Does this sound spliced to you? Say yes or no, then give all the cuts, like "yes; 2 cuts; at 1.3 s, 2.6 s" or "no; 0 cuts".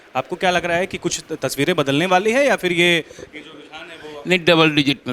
no; 0 cuts